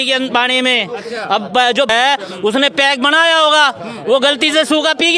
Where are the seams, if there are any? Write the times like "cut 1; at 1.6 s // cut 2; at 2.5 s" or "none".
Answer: cut 1; at 1.9 s